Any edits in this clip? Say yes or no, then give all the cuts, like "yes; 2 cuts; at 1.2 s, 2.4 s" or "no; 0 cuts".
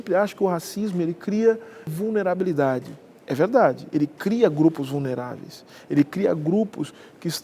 yes; 1 cut; at 1.9 s